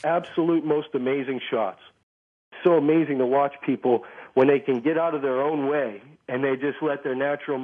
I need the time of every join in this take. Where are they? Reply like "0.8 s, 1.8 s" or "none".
2.4 s